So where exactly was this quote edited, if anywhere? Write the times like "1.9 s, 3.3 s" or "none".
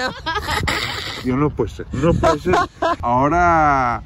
3.0 s